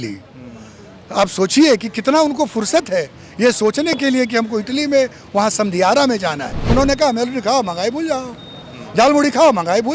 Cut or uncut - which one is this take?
cut